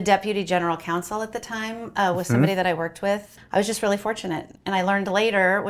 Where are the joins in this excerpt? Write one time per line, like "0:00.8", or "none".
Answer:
0:03.3